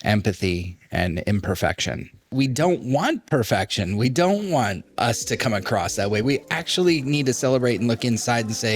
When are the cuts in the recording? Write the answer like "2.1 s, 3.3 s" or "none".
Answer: 2.3 s, 4.9 s